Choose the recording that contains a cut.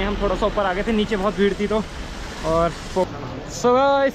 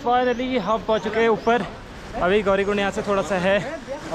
first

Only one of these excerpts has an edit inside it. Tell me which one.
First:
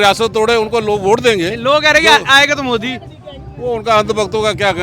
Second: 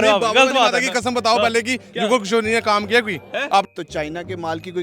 second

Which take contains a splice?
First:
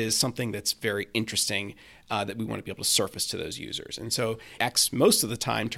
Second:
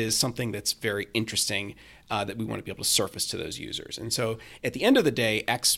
first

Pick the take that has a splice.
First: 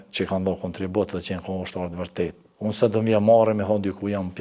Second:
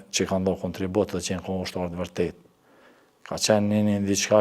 first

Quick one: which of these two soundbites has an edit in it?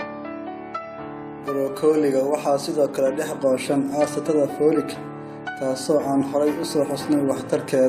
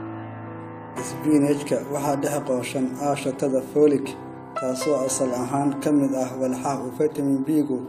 first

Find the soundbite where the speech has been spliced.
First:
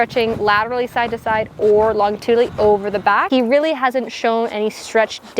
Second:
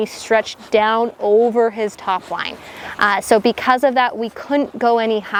first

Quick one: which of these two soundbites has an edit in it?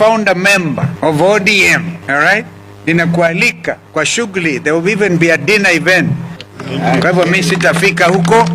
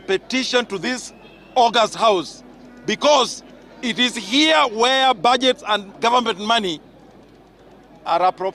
first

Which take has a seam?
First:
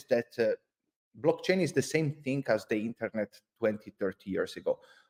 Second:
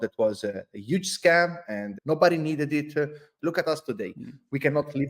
second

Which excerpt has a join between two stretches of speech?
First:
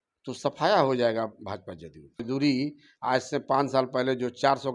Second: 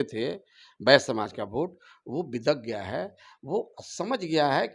first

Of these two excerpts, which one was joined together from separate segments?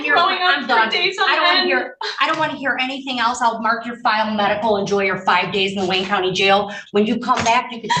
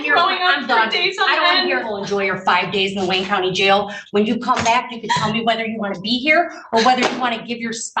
second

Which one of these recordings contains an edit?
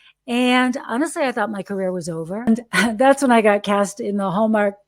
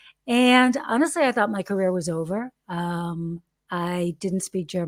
first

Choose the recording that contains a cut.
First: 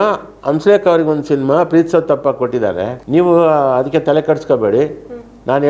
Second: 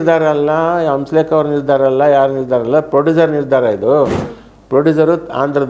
first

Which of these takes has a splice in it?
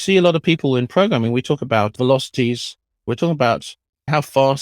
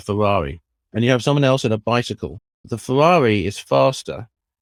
first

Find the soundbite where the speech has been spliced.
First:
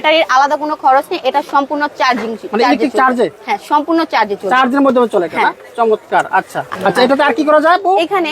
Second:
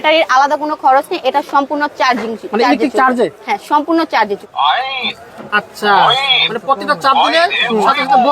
second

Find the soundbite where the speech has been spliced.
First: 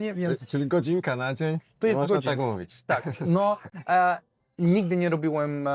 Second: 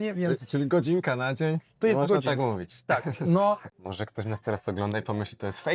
second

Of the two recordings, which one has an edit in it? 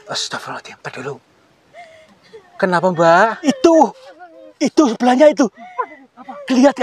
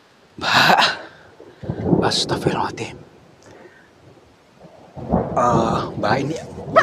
first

